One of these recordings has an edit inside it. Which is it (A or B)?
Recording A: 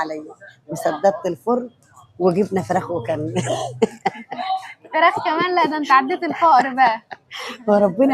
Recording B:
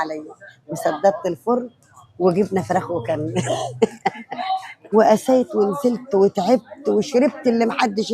B